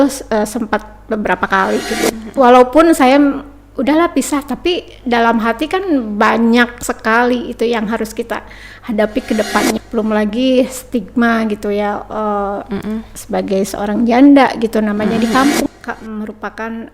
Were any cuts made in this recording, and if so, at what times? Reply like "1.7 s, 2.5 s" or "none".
2.1 s, 9.8 s, 15.7 s